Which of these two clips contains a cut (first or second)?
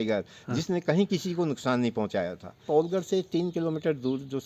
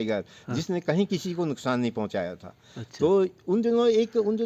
first